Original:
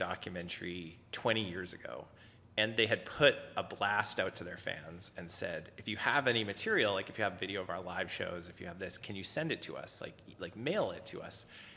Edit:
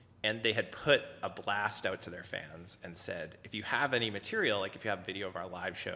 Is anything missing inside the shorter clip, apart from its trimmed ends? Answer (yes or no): no